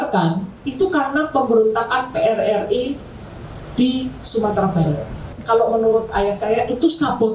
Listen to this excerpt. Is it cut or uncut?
cut